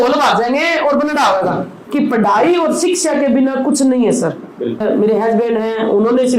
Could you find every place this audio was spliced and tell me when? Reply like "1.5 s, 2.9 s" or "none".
1.8 s, 4.8 s